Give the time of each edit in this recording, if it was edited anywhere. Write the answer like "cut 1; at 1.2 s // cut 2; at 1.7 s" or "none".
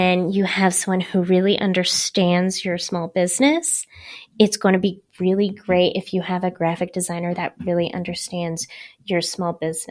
none

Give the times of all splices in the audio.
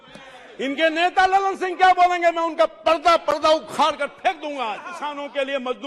cut 1; at 4.9 s

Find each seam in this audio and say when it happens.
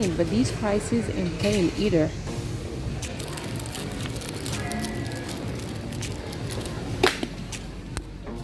none

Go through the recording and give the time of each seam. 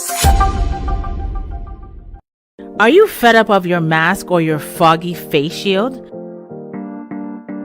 cut 1; at 2.6 s

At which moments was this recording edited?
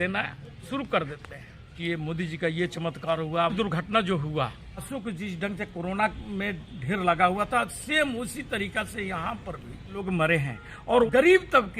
cut 1; at 1.7 s // cut 2; at 3.5 s // cut 3; at 4.9 s // cut 4; at 10.0 s // cut 5; at 11.1 s

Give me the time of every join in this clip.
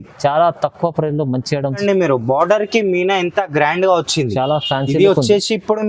cut 1; at 1.8 s

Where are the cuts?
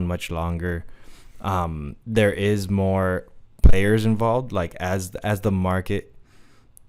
none

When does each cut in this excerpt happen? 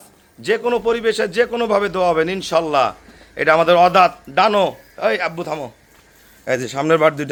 none

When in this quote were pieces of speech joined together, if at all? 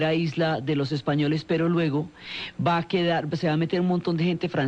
cut 1; at 1.8 s

